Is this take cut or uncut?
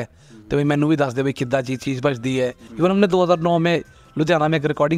cut